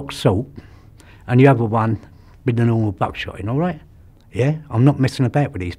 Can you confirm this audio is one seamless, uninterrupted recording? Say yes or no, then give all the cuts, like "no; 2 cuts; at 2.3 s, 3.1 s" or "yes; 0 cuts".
yes; 0 cuts